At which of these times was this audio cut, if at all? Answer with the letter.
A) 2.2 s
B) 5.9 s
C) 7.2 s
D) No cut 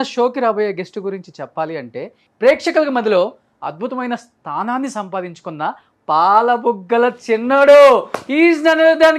A